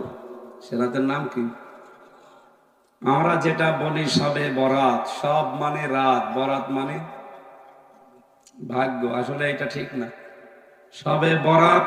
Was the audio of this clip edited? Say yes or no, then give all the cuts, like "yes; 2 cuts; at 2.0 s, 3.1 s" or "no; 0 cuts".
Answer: no; 0 cuts